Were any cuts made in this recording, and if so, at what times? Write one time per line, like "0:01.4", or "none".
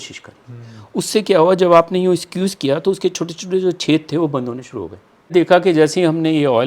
0:05.3